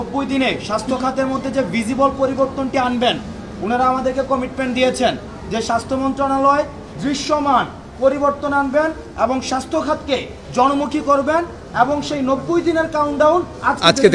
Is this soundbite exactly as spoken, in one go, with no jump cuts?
yes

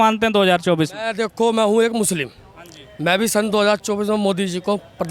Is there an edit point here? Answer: no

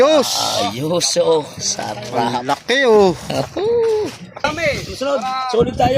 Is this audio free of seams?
no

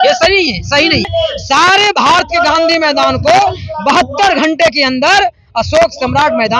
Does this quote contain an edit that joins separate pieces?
yes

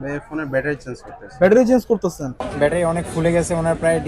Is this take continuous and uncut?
no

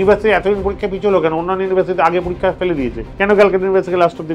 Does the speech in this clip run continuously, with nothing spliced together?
no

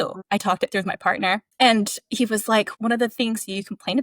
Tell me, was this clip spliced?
yes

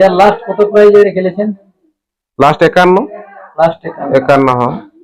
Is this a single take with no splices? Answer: yes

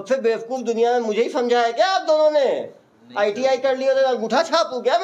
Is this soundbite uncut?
yes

